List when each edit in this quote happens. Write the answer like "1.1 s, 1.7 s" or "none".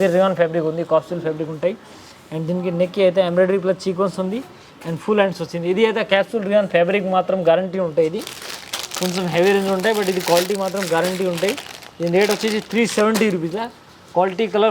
none